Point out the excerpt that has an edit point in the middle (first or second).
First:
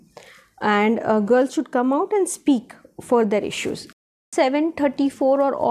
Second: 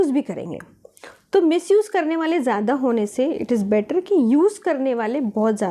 first